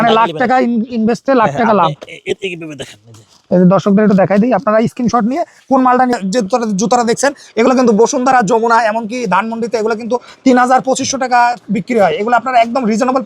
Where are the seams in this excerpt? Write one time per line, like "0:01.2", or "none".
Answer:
0:06.2